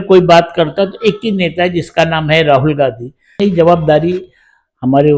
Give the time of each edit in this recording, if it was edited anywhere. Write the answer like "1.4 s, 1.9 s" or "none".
3.4 s